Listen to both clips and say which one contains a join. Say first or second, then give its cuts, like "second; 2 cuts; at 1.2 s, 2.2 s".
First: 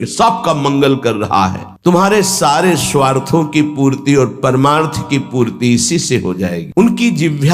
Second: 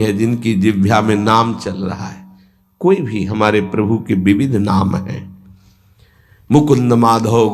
first; 2 cuts; at 1.7 s, 6.6 s